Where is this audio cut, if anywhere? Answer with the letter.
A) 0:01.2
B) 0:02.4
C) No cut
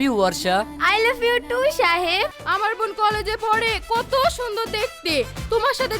B